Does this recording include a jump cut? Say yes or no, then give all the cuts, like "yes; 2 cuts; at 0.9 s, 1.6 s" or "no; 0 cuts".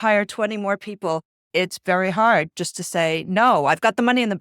yes; 1 cut; at 1.4 s